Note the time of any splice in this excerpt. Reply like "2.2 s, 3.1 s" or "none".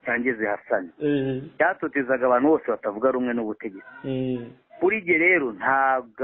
none